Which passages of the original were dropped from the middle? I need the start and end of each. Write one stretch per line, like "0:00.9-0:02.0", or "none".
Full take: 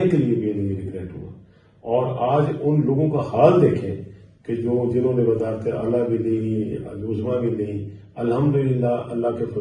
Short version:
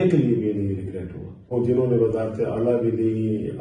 0:01.5-0:04.8